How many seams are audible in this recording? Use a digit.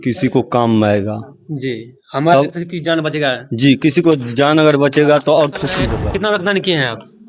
1